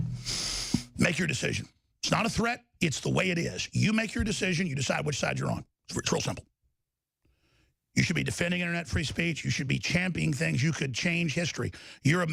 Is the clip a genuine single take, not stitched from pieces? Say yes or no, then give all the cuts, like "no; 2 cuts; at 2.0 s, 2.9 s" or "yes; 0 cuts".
yes; 0 cuts